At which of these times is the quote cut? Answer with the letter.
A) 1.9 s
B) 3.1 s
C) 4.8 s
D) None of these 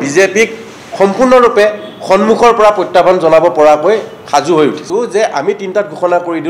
C